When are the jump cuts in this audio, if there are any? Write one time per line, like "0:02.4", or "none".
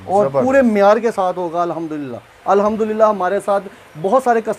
0:02.3